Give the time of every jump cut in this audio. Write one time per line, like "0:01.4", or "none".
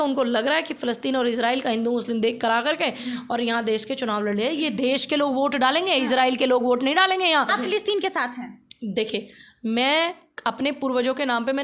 0:07.5